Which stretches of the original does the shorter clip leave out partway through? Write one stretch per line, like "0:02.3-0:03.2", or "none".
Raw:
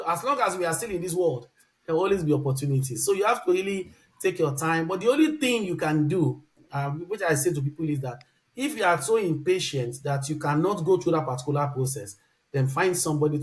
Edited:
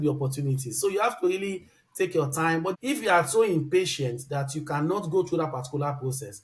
0:05.0-0:08.5

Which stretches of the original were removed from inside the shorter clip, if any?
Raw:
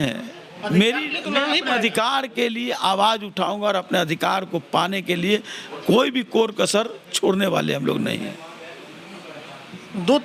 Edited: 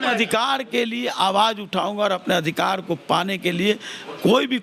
none

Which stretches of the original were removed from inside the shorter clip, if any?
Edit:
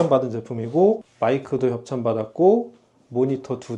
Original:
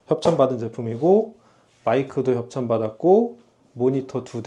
0:01.4-0:01.7

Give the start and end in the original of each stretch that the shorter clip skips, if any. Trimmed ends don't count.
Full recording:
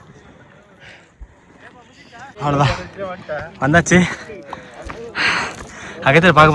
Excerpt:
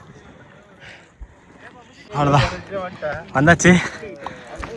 0:02.1-0:02.3

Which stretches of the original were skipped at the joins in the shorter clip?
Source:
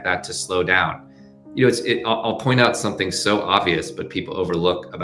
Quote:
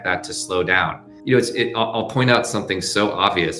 0:01.1-0:01.4

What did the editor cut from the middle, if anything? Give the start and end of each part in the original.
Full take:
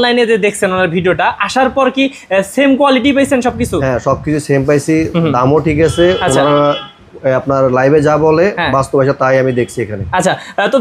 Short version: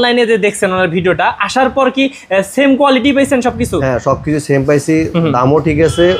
none

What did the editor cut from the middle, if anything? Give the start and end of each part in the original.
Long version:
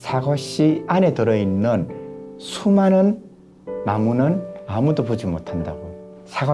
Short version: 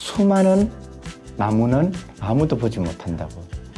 none

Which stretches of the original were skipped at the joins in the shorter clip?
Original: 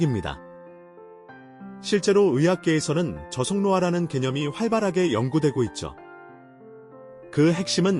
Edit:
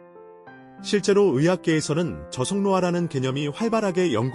0:01.7-0:01.9

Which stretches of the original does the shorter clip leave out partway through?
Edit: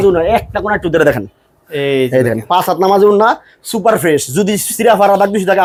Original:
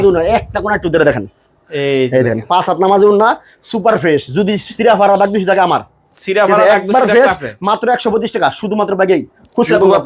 none

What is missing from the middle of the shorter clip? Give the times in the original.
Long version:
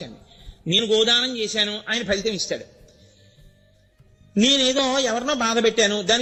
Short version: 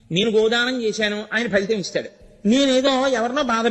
0:02.8-0:04.1

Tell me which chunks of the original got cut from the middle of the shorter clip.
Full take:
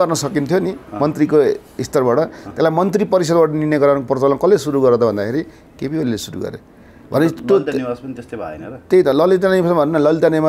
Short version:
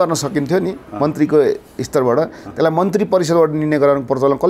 none

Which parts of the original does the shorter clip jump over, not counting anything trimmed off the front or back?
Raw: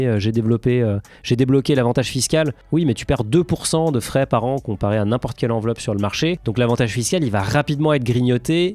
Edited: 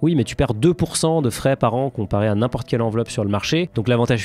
none

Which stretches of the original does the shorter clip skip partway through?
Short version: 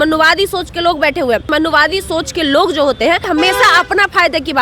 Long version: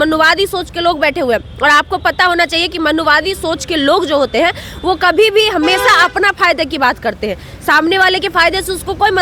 0:01.5-0:02.8
0:04.6-0:05.5

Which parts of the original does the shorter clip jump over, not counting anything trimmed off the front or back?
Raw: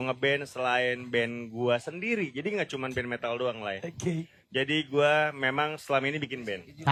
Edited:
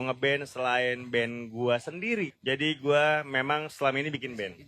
0:02.3-0:04.4

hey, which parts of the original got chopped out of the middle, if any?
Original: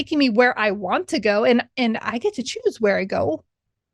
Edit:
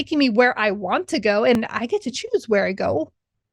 0:01.6-0:01.9

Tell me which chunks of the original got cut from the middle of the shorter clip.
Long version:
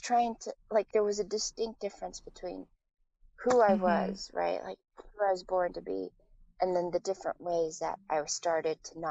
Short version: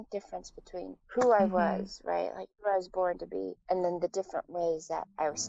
0:02.7-0:03.3
0:04.8-0:05.0
0:06.1-0:06.5

